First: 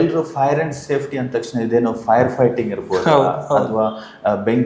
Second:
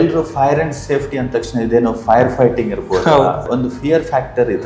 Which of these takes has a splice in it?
second; 1 cut; at 3.4 s

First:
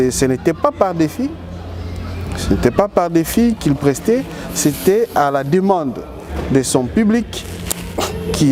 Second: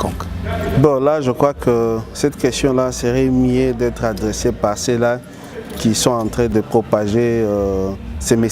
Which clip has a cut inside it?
second; 1 cut; at 6.5 s

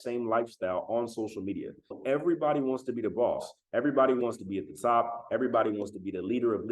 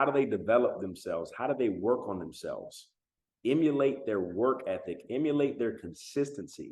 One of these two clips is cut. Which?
first; 1 cut; at 2.0 s

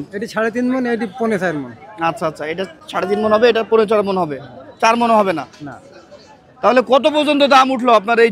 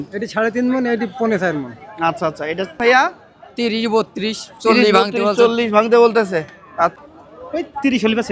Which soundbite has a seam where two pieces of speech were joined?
second; 2 cuts; at 2.8 s, 7.0 s

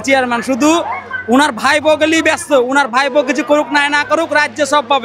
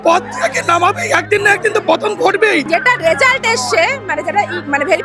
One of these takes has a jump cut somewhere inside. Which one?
second; 1 cut; at 2.7 s

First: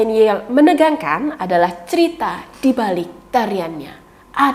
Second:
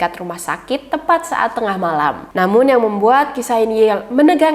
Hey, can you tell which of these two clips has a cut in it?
second; 1 cut; at 2.2 s

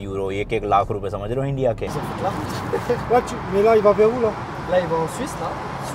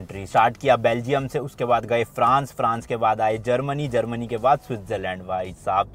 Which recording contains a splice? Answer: first; 1 cut; at 1.9 s

